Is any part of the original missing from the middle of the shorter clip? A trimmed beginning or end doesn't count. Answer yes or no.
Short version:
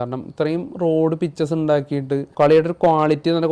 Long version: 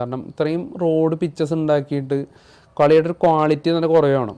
yes